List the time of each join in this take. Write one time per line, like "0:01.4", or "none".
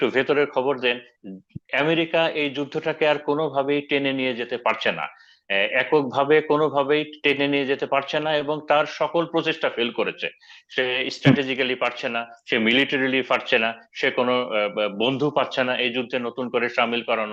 none